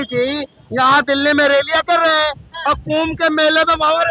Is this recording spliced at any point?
no; 0 cuts

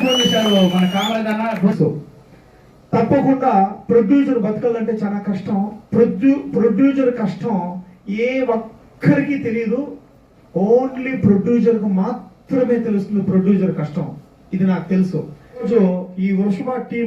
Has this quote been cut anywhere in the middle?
yes; 2 cuts; at 1.7 s, 15.6 s

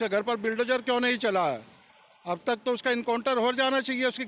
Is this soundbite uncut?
yes; 0 cuts

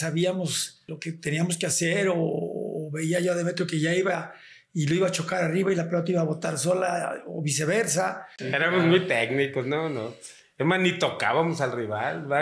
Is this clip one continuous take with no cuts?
no; 2 cuts; at 0.9 s, 8.6 s

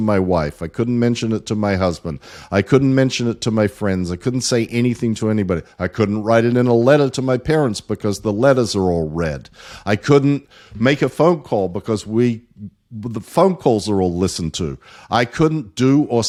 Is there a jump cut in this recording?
no; 0 cuts

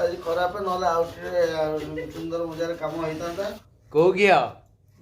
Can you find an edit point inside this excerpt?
yes; 1 cut; at 3.6 s

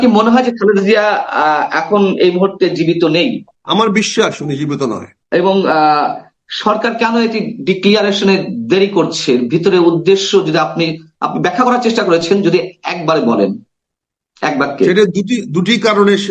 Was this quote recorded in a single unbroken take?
no; 2 cuts; at 3.5 s, 5.1 s

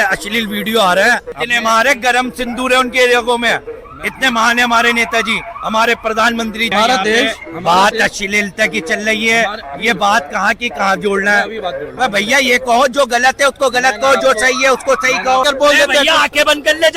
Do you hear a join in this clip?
yes; 3 cuts; at 1.3 s, 6.7 s, 15.4 s

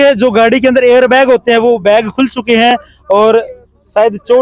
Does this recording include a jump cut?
no; 0 cuts

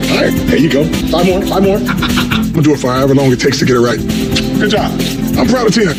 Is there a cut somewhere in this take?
no; 0 cuts

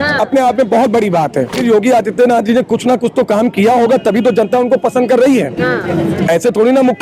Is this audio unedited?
no; 1 cut; at 1.6 s

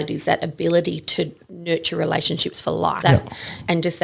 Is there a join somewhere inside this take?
yes; 1 cut; at 3.0 s

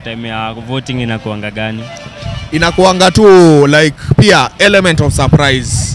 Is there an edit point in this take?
no; 0 cuts

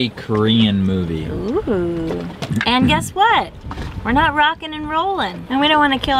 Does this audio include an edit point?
no; 0 cuts

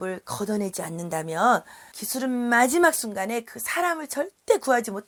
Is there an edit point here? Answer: no; 0 cuts

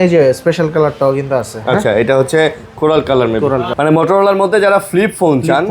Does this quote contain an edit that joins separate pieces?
yes; 1 cut; at 3.7 s

